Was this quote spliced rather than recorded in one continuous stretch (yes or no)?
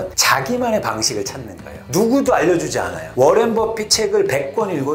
no